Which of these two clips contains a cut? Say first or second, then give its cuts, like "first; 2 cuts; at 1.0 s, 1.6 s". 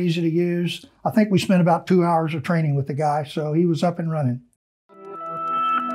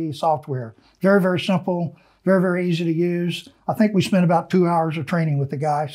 first; 1 cut; at 4.7 s